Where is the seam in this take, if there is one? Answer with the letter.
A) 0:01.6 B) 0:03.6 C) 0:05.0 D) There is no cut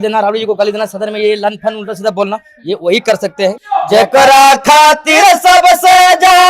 B